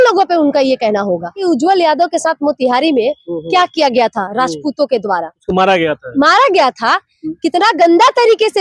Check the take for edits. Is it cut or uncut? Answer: cut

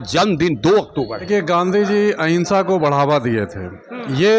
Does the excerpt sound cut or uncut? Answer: cut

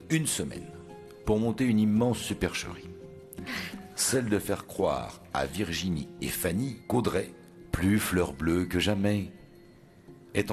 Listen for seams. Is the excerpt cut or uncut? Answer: uncut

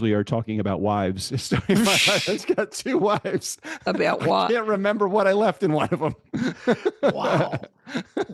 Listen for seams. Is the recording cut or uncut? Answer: uncut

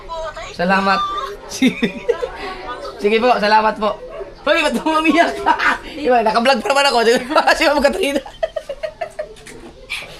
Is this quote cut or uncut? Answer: uncut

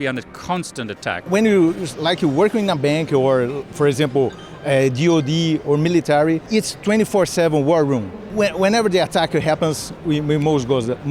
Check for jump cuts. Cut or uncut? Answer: cut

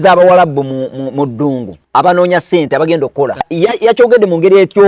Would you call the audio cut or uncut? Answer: cut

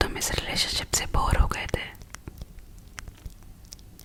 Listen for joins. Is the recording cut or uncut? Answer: uncut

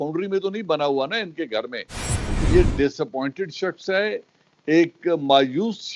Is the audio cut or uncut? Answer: cut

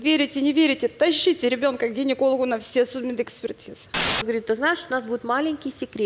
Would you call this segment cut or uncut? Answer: cut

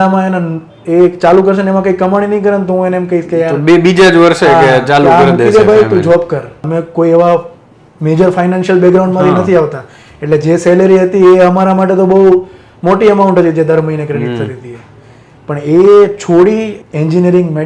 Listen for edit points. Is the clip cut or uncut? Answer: cut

